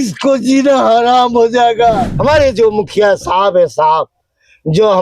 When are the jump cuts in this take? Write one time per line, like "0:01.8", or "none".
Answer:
0:02.1